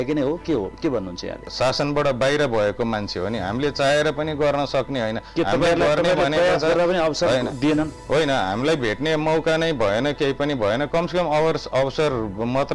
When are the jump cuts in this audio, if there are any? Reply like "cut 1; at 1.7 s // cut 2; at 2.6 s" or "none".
cut 1; at 1.5 s